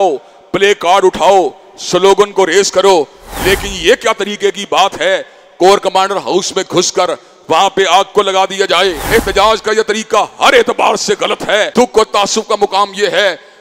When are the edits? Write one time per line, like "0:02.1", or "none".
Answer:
0:09.0
0:11.7